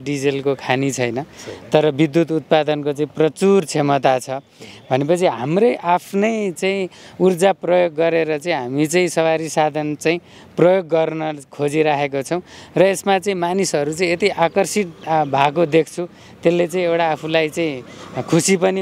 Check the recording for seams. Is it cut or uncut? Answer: uncut